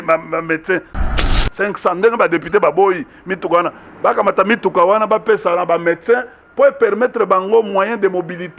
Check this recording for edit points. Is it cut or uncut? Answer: cut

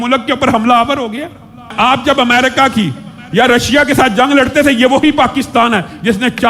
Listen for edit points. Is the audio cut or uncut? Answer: cut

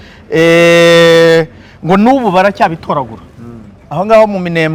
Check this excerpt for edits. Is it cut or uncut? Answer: uncut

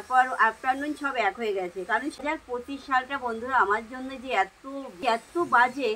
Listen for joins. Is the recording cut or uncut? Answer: cut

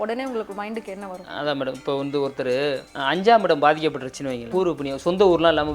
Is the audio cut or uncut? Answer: cut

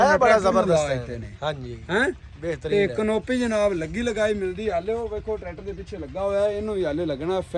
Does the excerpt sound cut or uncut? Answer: uncut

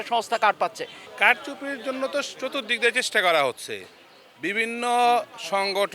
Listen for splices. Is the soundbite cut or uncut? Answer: uncut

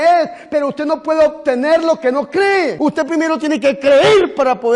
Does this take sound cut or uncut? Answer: cut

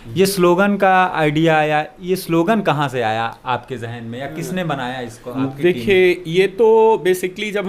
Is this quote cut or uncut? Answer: uncut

